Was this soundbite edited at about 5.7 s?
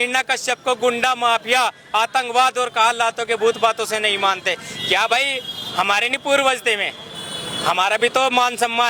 no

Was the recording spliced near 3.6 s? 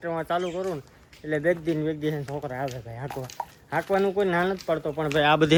no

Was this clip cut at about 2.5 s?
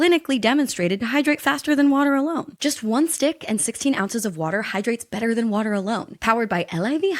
yes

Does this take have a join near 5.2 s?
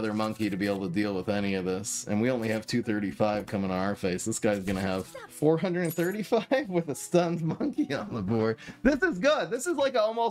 yes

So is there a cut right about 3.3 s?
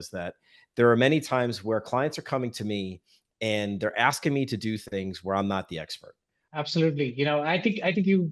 no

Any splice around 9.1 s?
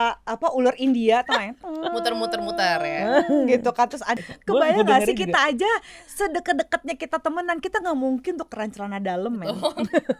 no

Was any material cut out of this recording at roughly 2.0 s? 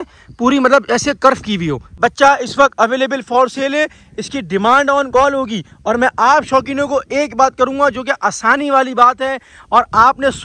yes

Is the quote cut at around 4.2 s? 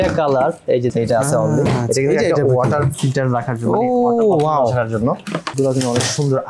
no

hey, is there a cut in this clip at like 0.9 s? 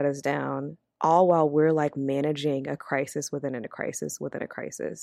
no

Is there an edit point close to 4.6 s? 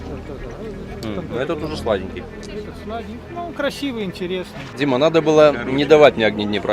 yes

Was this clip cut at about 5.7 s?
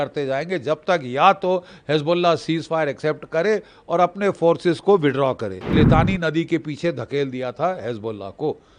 yes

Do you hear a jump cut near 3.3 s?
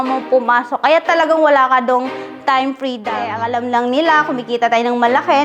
yes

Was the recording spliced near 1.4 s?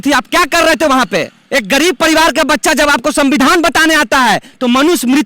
yes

